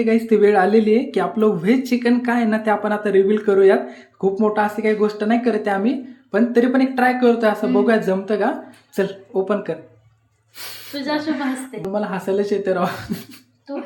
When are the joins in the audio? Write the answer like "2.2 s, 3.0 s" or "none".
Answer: none